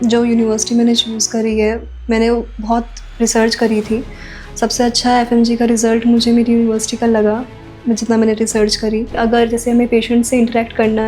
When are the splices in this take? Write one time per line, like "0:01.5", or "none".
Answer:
0:09.2